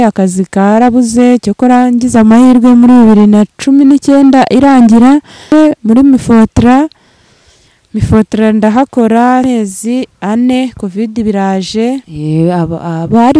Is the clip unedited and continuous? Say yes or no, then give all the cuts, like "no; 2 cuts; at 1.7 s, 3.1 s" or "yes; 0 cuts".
no; 3 cuts; at 5.5 s, 9.4 s, 12.1 s